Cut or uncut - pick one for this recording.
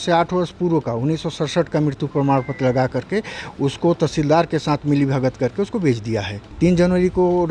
cut